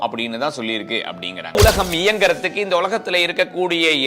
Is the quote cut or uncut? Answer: cut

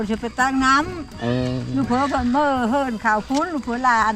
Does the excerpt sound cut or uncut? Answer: uncut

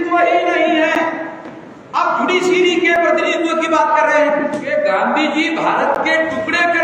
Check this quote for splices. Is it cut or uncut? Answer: cut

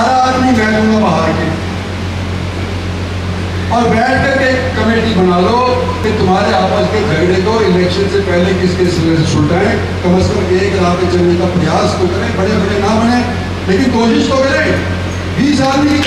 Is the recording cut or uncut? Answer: uncut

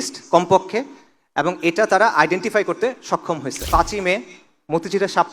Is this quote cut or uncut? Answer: cut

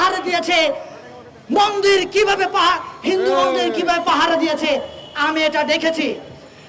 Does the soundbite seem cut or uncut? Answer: uncut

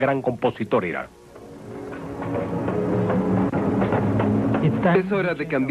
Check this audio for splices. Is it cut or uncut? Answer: cut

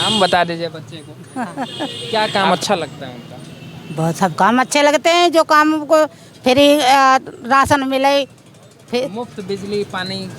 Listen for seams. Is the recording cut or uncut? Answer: cut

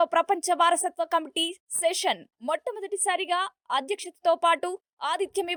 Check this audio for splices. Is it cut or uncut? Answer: uncut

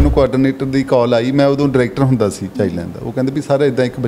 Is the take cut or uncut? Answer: uncut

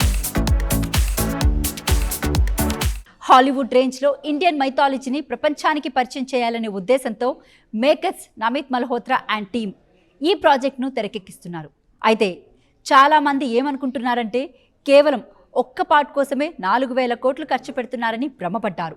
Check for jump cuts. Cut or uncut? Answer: cut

